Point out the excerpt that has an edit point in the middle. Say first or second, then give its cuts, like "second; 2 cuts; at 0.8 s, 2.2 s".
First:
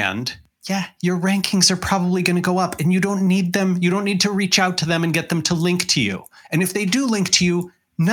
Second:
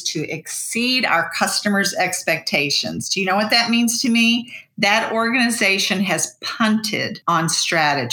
second; 1 cut; at 7.1 s